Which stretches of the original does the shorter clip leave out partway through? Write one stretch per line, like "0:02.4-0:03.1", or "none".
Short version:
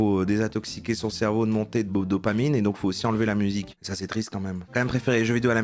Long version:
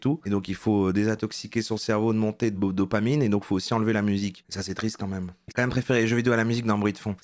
0:05.3-0:05.4